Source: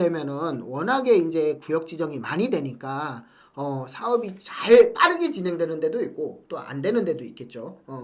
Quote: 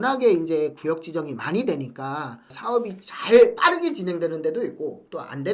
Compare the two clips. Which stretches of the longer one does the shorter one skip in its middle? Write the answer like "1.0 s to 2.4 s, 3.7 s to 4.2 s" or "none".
3.4 s to 3.9 s